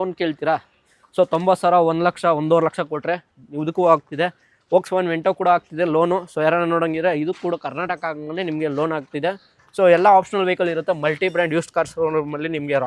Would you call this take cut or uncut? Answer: uncut